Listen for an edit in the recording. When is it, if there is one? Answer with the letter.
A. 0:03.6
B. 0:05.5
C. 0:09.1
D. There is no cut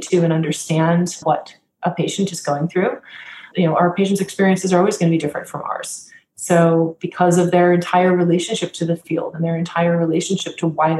A